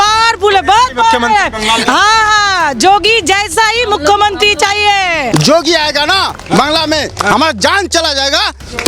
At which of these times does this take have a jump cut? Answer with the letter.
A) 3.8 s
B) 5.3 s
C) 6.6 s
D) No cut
B